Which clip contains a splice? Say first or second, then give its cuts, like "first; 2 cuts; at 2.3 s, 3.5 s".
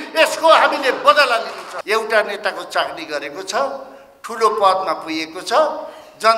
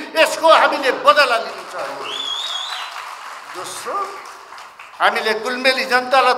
first; 1 cut; at 1.7 s